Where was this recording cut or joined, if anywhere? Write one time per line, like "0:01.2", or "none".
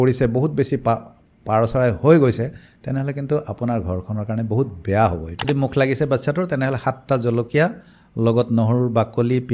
0:05.5